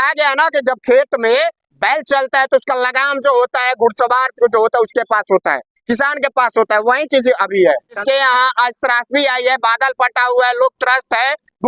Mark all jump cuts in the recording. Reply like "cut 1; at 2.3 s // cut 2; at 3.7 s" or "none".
cut 1; at 8.0 s